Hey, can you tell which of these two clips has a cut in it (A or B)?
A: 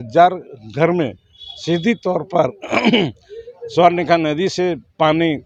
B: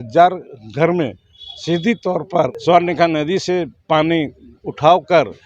B